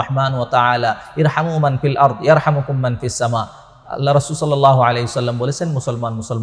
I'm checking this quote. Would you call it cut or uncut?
uncut